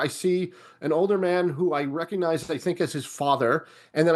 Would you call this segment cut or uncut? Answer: uncut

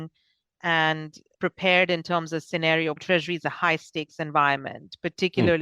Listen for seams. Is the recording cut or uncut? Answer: cut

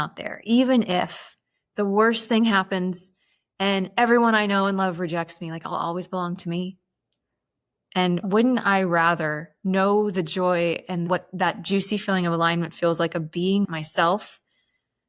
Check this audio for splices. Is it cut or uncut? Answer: cut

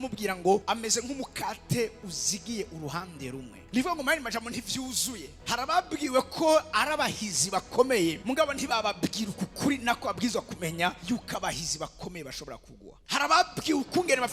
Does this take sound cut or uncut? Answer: uncut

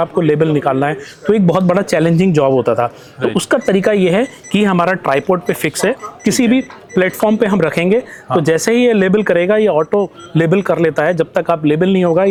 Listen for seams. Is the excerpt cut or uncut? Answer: uncut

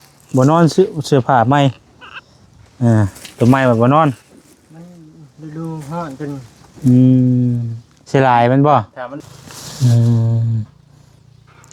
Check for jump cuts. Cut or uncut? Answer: cut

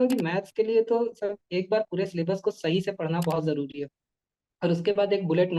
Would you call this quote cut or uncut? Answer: uncut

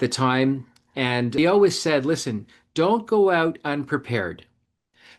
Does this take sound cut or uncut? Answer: cut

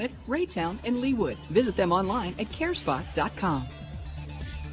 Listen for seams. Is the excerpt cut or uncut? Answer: cut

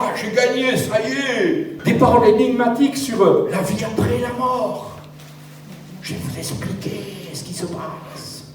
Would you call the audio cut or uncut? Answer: cut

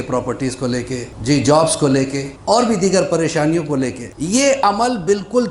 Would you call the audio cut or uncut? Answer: cut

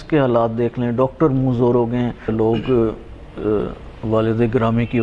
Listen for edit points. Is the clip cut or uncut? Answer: cut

